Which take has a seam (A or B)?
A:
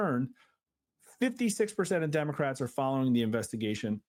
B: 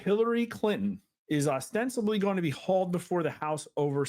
B